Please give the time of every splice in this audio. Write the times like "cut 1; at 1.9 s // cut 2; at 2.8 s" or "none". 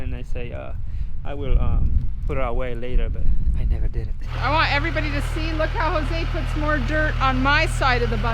cut 1; at 4.3 s